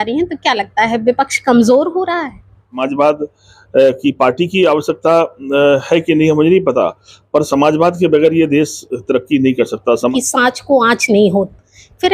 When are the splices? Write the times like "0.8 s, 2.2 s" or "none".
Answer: 2.8 s, 10.1 s